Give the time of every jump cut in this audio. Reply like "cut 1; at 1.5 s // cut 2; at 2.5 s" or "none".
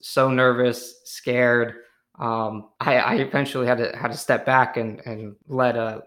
none

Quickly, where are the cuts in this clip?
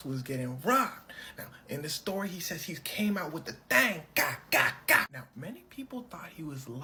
none

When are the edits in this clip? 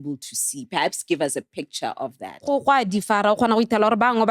cut 1; at 2.4 s

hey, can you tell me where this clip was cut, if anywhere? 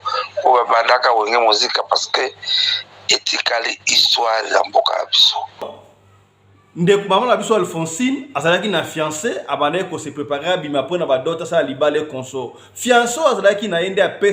cut 1; at 5.8 s

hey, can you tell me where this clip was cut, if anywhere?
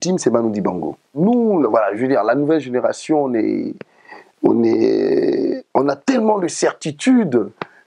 cut 1; at 1.2 s

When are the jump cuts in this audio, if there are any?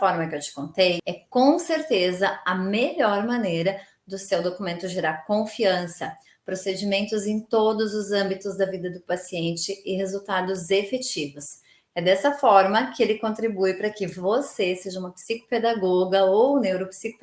cut 1; at 1.0 s

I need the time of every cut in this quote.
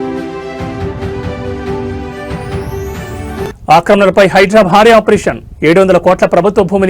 cut 1; at 3.3 s

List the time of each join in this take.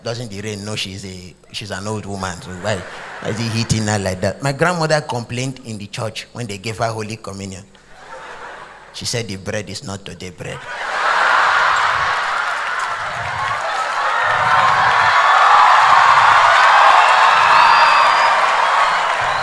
none

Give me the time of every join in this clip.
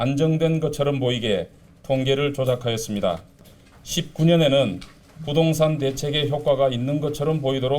cut 1; at 3.4 s

